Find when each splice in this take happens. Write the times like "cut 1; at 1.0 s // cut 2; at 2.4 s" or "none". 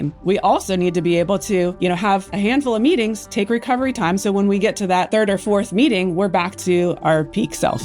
cut 1; at 7.0 s